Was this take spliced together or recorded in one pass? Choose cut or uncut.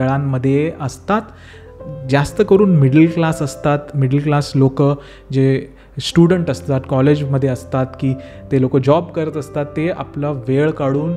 uncut